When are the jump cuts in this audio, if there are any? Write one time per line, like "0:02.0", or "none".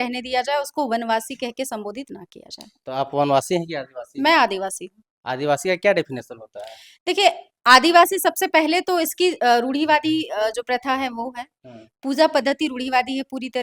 none